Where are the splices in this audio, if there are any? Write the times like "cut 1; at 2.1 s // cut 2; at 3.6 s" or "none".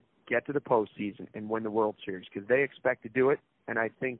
none